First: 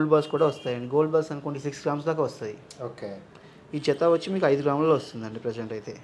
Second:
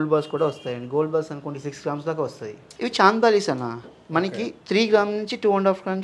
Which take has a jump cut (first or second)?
second